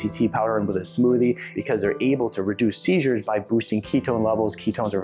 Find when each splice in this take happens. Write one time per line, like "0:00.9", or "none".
0:01.5